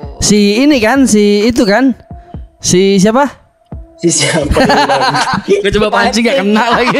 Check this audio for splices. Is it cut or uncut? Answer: uncut